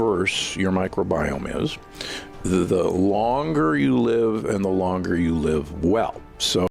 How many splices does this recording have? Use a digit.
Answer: 0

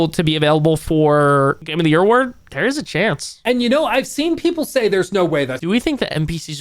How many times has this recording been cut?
3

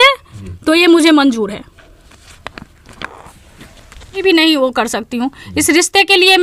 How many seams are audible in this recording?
0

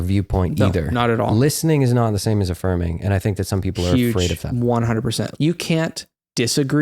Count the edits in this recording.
2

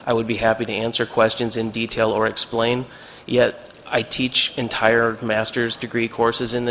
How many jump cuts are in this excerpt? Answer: 1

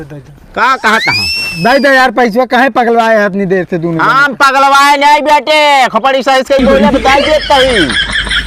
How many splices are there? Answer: 0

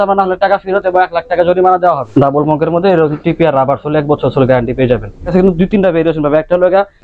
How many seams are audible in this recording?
2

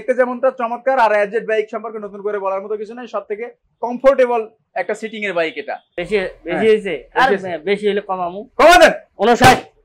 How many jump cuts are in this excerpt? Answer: 1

